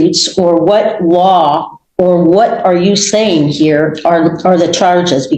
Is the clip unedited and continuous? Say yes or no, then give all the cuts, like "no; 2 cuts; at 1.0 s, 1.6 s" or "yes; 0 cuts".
yes; 0 cuts